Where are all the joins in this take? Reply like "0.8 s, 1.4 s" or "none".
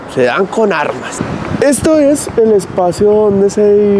1.1 s